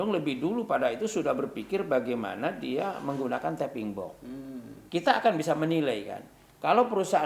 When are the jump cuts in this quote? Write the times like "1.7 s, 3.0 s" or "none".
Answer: 4.7 s